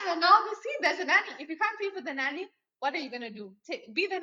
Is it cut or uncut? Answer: uncut